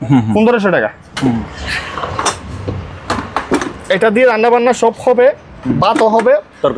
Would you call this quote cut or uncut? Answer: cut